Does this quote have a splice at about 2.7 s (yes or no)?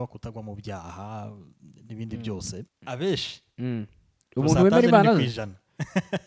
yes